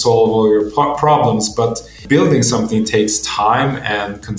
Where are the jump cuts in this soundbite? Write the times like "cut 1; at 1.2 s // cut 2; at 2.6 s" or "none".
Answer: cut 1; at 2.0 s